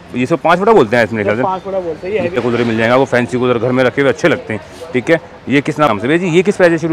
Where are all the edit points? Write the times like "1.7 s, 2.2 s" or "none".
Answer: 2.4 s, 5.9 s